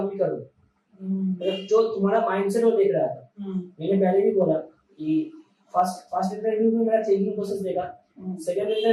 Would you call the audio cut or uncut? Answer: uncut